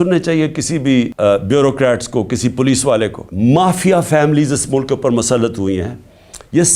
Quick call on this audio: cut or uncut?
cut